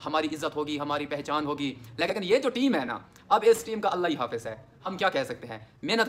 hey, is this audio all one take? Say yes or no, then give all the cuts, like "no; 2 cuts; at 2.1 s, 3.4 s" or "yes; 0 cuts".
no; 1 cut; at 2.1 s